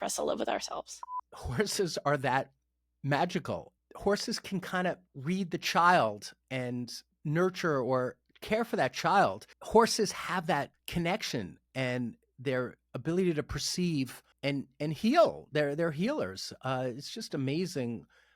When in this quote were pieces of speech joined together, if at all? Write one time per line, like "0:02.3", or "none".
0:01.1
0:03.7
0:09.5